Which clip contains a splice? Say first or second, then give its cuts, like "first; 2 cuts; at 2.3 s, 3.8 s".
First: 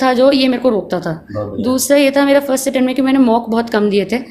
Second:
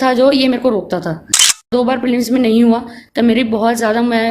second; 1 cut; at 1.6 s